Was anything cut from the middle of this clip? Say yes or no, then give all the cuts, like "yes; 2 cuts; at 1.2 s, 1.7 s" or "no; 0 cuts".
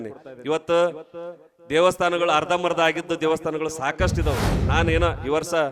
yes; 1 cut; at 4.6 s